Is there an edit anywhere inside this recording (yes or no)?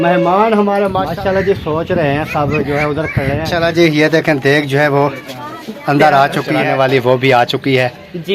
yes